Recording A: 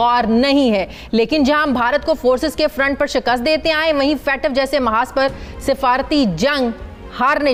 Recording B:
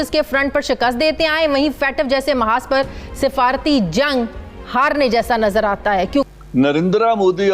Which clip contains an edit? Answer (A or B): B